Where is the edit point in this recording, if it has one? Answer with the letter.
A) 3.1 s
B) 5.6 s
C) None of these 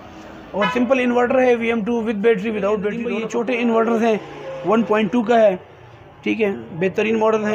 A